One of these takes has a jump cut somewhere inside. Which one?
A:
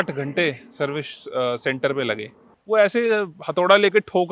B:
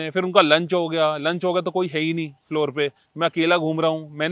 A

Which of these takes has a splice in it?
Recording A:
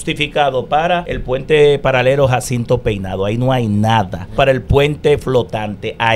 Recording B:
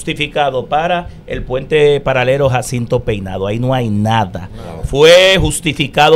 A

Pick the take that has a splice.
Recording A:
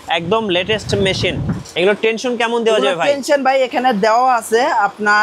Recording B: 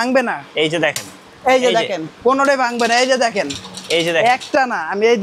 A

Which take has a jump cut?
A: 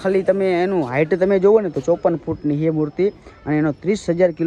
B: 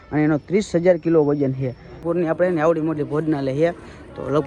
B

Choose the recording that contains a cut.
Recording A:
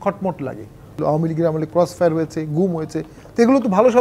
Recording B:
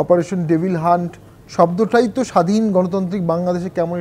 A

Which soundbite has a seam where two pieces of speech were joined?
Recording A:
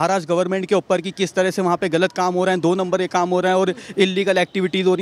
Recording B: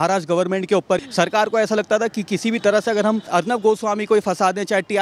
B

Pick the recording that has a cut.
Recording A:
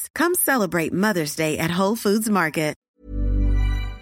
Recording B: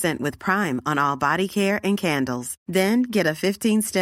A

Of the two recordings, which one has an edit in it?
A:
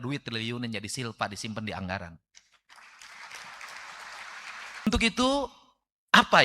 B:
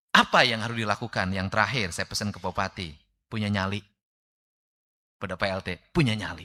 A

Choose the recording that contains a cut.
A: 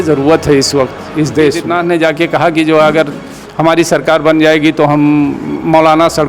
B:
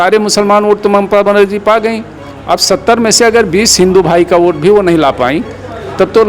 A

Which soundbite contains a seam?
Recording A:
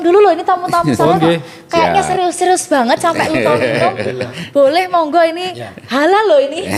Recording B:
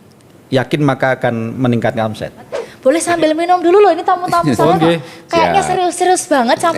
B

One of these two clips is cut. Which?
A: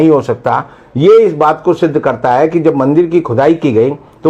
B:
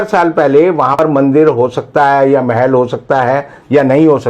B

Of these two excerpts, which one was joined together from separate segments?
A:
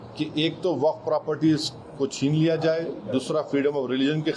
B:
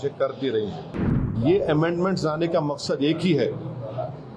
B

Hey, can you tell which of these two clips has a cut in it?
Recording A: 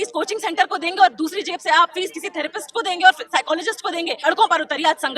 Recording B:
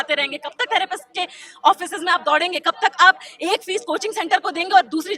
A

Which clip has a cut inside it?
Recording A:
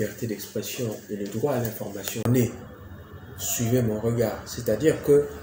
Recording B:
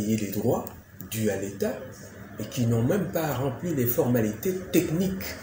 A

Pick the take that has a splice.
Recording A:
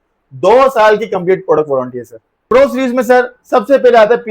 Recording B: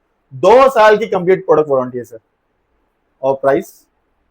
A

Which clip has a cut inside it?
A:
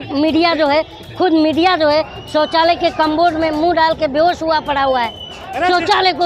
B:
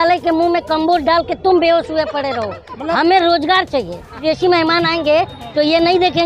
B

